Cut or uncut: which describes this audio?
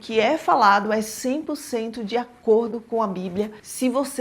uncut